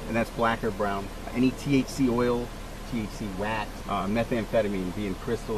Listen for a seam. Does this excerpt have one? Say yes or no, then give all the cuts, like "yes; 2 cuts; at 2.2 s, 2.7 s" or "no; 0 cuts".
yes; 2 cuts; at 1.3 s, 3.8 s